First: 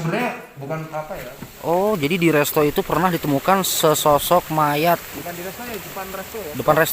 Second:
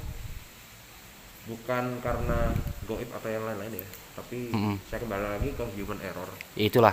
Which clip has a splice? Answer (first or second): first